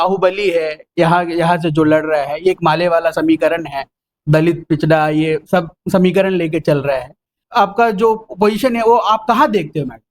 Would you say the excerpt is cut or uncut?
cut